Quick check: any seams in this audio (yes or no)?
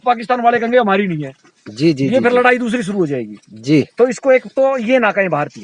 no